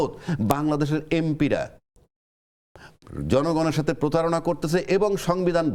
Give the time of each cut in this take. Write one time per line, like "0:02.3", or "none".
none

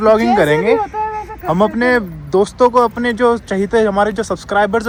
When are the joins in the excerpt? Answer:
none

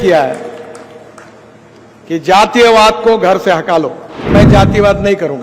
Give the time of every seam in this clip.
0:04.3

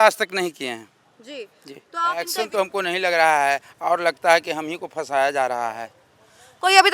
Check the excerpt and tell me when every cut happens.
0:02.2

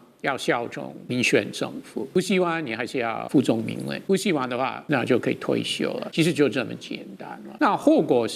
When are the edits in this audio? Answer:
0:01.0
0:02.2
0:03.3
0:04.0
0:04.8
0:06.0
0:07.5

